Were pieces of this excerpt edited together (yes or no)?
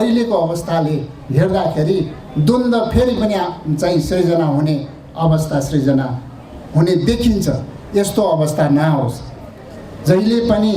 no